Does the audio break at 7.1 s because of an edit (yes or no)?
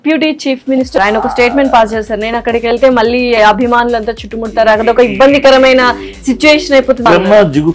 yes